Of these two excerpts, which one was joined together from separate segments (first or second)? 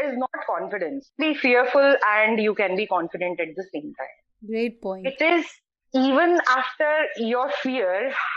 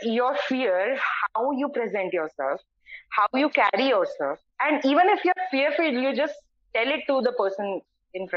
first